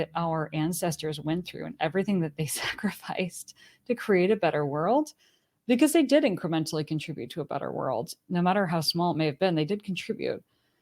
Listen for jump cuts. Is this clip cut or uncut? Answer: uncut